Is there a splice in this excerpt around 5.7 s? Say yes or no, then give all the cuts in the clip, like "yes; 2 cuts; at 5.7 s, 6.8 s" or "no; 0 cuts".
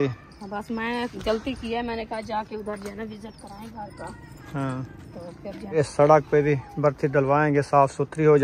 yes; 1 cut; at 5.7 s